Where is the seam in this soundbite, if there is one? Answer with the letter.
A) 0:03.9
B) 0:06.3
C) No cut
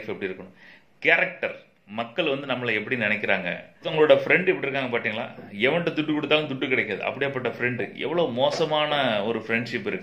A